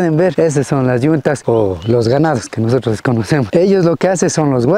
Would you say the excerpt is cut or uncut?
uncut